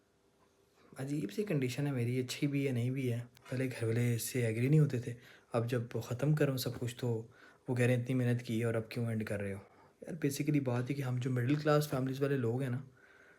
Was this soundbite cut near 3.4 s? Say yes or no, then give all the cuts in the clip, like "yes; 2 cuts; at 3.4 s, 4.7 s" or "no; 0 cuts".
yes; 1 cut; at 3.4 s